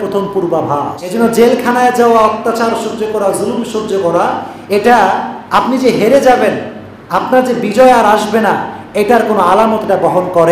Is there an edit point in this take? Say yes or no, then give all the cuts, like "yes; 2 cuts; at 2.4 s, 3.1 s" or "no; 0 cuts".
yes; 1 cut; at 1.1 s